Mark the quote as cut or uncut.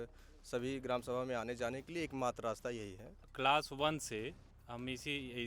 cut